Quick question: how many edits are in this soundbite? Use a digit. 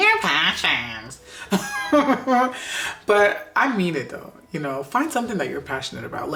0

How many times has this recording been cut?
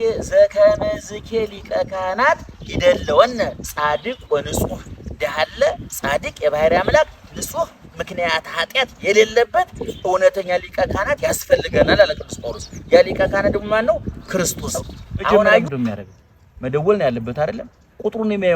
1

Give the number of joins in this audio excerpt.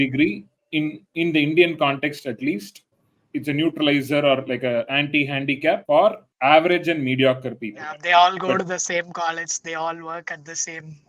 1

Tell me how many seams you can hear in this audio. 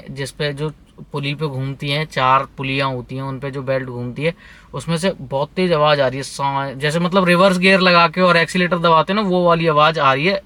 0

